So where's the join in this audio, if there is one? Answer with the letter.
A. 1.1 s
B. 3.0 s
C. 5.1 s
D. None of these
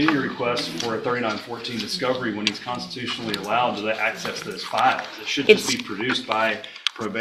D